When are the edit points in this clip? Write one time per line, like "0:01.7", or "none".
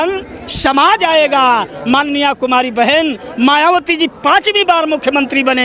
none